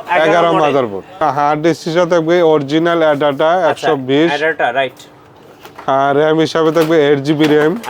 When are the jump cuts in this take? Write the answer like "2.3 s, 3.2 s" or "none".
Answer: 1.2 s